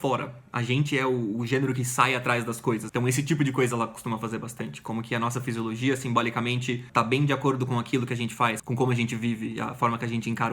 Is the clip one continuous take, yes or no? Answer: no